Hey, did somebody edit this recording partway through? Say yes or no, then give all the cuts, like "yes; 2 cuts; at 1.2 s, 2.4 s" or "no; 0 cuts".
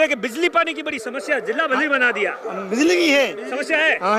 no; 0 cuts